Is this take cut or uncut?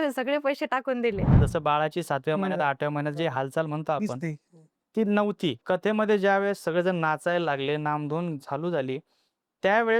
cut